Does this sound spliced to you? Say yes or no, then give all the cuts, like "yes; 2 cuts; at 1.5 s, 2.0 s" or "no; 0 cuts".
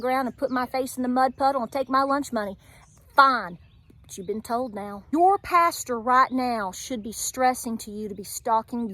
yes; 1 cut; at 5.0 s